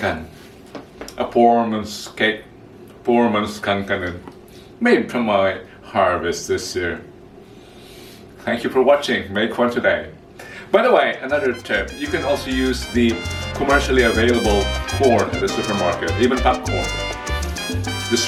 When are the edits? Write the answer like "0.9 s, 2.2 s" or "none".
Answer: none